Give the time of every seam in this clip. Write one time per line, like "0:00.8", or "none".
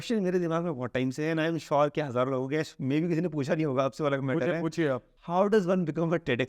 0:05.1